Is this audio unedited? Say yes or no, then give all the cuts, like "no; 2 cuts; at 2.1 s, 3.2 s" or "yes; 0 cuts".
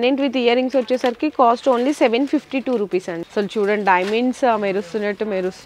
no; 1 cut; at 3.2 s